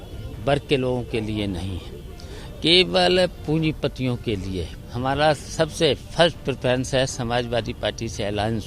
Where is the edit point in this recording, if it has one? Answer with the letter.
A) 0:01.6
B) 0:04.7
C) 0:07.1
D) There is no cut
B